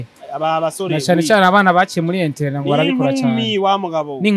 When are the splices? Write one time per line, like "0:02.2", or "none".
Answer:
none